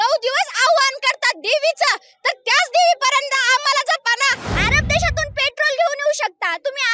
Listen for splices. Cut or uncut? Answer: cut